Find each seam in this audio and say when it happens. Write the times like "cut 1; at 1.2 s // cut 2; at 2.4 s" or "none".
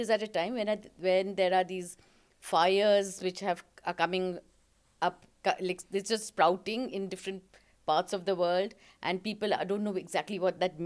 none